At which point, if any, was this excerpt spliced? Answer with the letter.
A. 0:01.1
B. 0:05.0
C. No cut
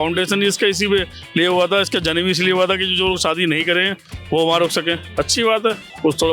B